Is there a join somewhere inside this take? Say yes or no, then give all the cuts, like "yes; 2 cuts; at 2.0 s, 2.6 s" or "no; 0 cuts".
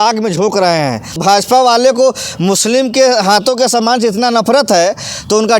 yes; 1 cut; at 1.2 s